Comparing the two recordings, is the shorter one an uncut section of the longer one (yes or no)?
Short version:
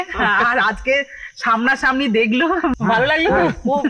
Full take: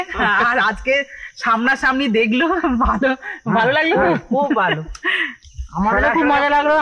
no